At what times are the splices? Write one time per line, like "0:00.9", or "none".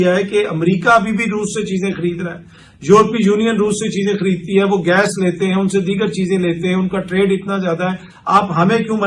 none